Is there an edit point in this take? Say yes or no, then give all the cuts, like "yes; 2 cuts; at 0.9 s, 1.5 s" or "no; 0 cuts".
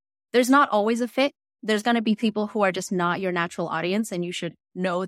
no; 0 cuts